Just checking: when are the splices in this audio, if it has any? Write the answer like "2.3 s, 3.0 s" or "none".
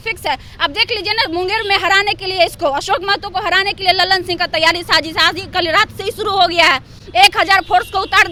none